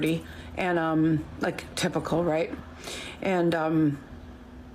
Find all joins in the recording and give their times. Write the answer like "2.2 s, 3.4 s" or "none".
2.5 s